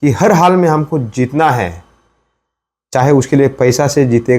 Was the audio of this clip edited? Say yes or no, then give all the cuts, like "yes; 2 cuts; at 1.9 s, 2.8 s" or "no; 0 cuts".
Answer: no; 0 cuts